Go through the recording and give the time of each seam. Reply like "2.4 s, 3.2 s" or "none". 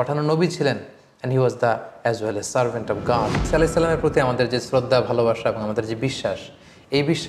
3.5 s